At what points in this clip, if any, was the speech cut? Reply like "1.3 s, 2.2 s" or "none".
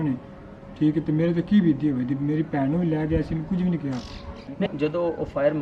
4.6 s